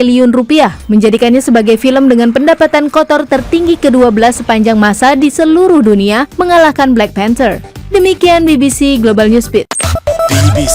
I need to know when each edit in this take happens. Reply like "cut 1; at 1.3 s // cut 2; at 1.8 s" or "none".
cut 1; at 7.7 s

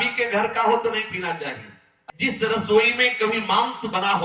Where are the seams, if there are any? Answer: cut 1; at 2.0 s

